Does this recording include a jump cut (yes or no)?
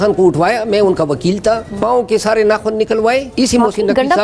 yes